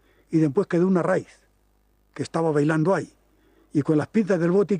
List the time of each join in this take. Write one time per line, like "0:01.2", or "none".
0:01.2